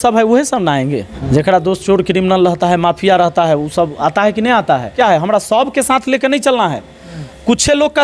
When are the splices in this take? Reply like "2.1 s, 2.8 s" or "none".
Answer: 1.1 s, 4.9 s